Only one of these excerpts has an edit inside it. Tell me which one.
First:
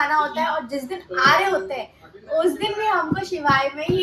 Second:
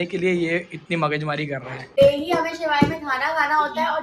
second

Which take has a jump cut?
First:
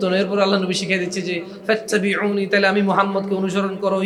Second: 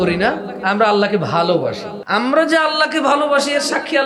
second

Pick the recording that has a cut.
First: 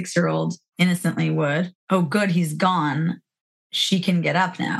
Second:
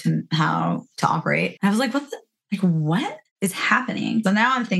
second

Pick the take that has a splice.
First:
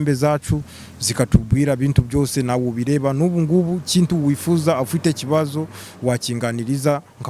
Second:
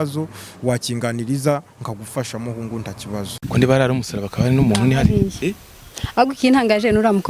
second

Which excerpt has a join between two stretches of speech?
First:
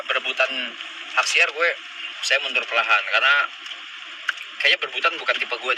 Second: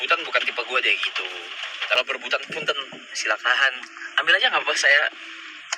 second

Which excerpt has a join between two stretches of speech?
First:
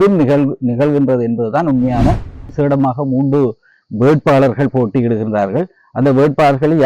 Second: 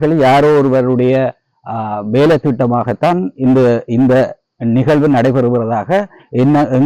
first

